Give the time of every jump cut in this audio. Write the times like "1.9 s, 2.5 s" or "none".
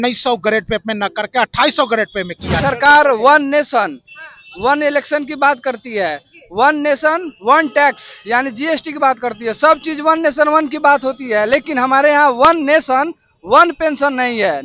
2.6 s